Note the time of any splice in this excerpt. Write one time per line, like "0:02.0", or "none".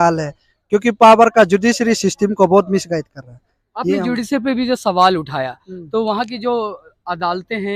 none